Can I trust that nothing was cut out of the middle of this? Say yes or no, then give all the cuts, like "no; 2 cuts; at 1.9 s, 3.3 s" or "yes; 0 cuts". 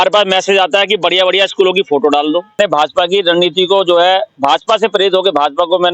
no; 1 cut; at 2.6 s